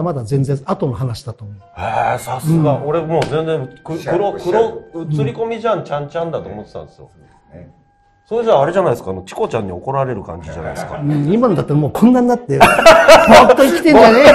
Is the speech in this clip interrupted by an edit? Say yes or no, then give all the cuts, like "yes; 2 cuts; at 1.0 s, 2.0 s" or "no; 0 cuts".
no; 0 cuts